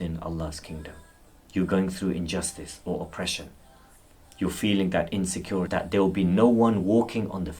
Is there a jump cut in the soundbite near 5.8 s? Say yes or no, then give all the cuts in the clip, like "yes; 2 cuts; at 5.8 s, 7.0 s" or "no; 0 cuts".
yes; 1 cut; at 5.8 s